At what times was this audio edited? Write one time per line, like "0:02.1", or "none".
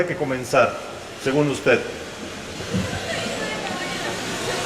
0:03.7